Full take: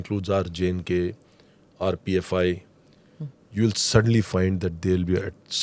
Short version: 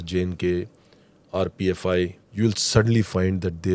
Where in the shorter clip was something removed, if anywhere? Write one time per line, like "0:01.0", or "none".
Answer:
0:02.2